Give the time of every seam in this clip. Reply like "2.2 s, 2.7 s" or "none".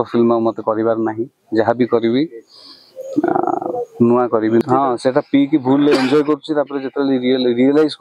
4.6 s